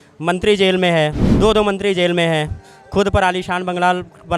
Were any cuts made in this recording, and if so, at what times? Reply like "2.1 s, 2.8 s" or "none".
1.2 s